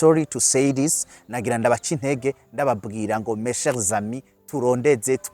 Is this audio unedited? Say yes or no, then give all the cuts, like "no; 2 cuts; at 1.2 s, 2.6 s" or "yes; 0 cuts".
yes; 0 cuts